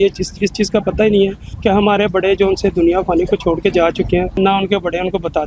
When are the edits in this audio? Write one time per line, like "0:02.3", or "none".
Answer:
0:01.5
0:04.4